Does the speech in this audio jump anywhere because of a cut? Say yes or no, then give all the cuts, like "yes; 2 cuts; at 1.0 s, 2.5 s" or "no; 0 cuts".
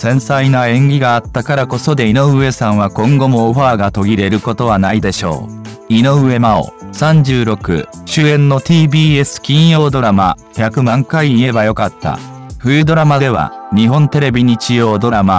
yes; 1 cut; at 6.0 s